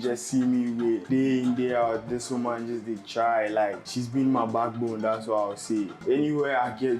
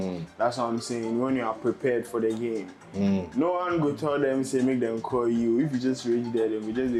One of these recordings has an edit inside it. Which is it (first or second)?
first